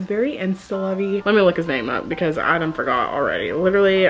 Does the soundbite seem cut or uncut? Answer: cut